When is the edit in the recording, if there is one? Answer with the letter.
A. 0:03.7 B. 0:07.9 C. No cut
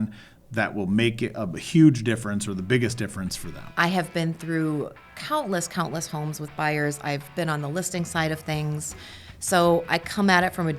A